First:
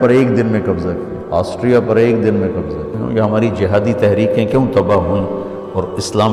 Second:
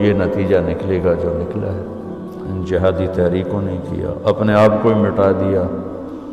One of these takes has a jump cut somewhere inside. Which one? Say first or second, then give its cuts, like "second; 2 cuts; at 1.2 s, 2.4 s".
first; 2 cuts; at 1.1 s, 3.0 s